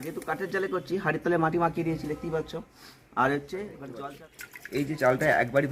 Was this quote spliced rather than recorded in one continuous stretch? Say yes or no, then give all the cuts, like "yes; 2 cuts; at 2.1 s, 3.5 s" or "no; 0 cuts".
yes; 1 cut; at 3.9 s